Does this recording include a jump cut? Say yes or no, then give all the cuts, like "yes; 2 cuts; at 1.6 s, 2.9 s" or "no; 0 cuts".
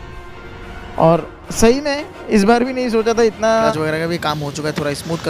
yes; 1 cut; at 3.7 s